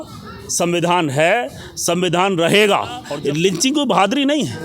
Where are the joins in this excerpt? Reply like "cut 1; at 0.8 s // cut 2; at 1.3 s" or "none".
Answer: cut 1; at 3.0 s